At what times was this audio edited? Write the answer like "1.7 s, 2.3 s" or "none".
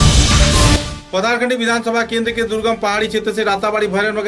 none